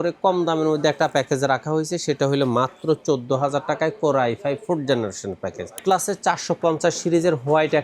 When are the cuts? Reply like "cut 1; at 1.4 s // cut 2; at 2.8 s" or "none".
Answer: cut 1; at 5.8 s